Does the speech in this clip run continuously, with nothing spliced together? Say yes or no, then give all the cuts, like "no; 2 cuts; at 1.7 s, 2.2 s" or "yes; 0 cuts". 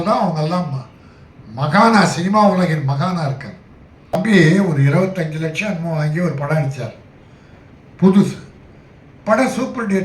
no; 1 cut; at 4.1 s